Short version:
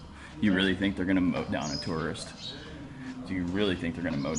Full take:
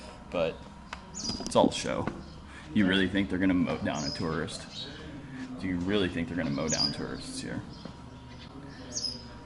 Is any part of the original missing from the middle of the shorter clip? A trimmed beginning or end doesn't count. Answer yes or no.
no